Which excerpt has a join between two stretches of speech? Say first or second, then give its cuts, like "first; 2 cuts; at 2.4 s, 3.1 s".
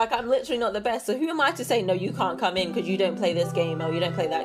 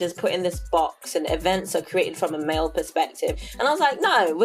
second; 1 cut; at 3.4 s